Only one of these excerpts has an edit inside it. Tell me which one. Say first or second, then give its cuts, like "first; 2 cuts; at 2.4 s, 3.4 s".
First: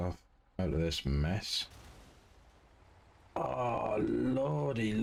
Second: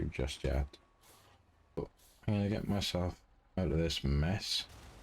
second; 1 cut; at 1.8 s